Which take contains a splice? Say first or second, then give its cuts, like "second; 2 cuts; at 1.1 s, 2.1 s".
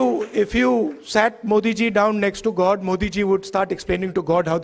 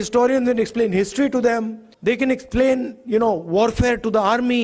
second; 1 cut; at 1.8 s